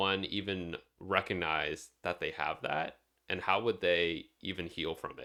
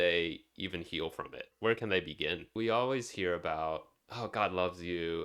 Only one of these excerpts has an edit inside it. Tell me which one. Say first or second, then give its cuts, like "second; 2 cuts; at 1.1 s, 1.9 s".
second; 1 cut; at 2.5 s